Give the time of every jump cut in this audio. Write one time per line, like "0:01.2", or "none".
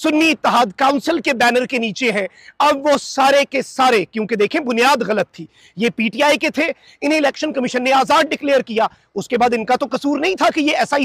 none